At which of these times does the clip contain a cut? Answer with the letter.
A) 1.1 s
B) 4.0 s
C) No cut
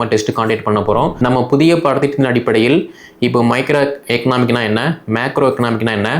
A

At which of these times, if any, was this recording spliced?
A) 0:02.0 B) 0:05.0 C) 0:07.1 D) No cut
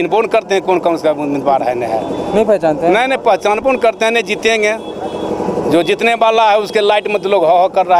D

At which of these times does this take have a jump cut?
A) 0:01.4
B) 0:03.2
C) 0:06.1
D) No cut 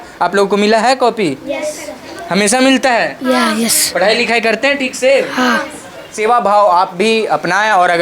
C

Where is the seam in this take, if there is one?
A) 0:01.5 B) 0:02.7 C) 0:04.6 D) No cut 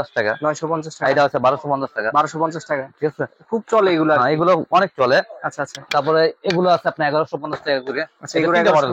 D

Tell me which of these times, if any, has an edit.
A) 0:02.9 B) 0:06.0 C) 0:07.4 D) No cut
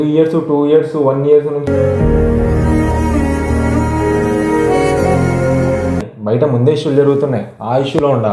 B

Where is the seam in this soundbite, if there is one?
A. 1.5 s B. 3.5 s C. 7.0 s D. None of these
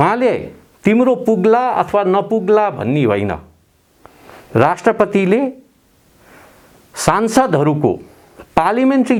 D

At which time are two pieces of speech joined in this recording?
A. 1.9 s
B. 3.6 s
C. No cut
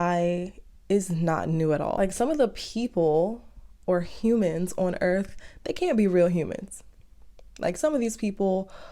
A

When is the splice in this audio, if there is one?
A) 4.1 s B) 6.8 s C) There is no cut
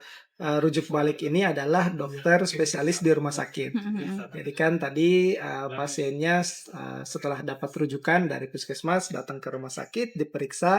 C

